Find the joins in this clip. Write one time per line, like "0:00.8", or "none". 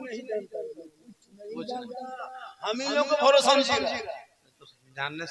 none